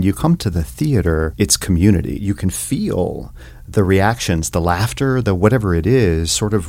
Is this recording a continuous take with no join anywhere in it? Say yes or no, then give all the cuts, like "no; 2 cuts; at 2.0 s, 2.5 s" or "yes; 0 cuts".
no; 2 cuts; at 1.3 s, 2.1 s